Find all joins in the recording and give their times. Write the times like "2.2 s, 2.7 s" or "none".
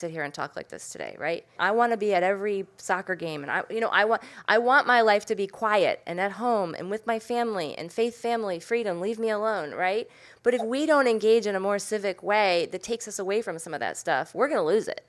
1.5 s